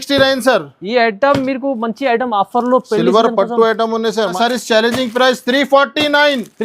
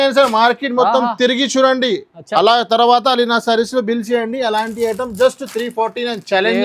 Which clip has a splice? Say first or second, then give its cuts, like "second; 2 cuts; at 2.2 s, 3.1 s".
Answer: first; 1 cut; at 4.3 s